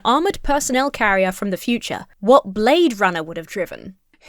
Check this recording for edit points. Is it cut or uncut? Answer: uncut